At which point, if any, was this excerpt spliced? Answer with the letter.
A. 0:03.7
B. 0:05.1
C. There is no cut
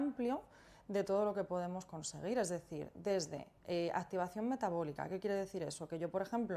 C